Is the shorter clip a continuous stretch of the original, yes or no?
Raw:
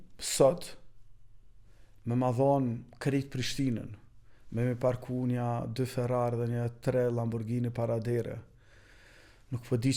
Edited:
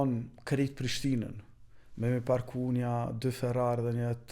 yes